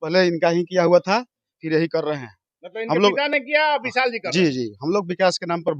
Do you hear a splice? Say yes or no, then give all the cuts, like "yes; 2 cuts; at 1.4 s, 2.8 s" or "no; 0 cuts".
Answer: no; 0 cuts